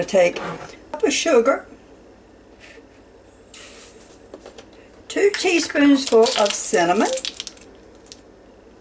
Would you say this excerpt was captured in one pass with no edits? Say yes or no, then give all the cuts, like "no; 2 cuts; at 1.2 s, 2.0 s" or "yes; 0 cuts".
no; 2 cuts; at 1.0 s, 4.1 s